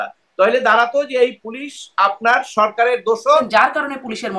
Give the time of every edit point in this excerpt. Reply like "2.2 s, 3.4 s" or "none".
3.5 s